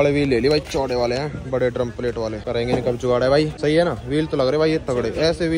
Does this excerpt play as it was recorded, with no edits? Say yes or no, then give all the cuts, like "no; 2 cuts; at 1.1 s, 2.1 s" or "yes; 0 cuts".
no; 2 cuts; at 2.4 s, 3.5 s